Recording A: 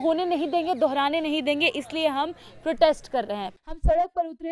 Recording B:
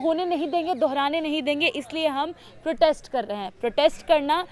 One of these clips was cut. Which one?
A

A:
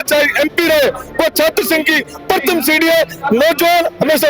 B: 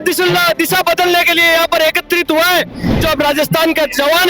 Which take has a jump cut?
B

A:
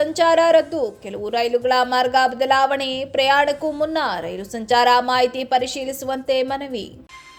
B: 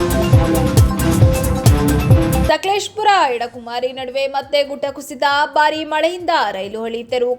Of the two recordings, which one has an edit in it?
B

